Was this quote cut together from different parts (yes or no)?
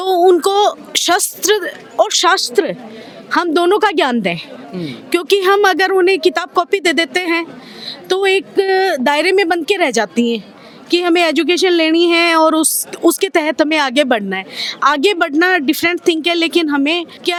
no